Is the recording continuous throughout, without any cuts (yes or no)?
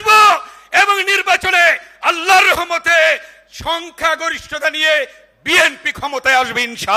yes